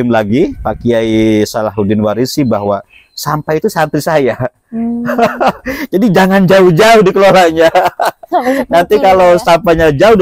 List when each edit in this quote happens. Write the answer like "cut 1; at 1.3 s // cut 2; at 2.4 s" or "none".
none